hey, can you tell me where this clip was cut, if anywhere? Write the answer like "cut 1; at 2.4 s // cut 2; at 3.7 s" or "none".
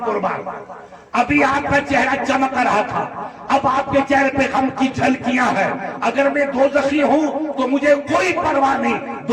none